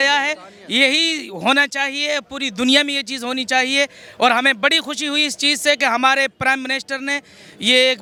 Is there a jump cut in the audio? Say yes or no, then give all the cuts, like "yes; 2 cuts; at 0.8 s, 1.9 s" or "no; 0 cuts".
no; 0 cuts